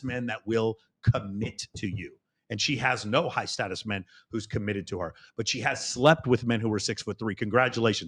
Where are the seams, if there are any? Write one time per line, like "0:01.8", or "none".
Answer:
none